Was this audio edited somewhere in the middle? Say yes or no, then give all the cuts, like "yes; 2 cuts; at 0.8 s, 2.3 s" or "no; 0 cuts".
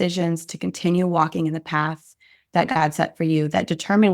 no; 0 cuts